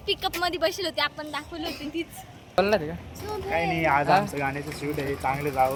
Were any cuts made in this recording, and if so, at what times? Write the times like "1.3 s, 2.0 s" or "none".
none